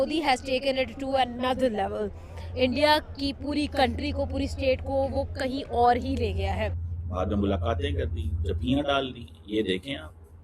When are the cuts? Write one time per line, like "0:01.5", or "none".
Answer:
0:06.9